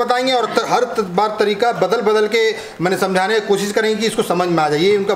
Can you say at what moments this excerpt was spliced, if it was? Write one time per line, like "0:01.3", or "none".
none